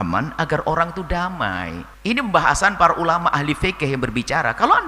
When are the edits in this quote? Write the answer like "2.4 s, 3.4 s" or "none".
1.8 s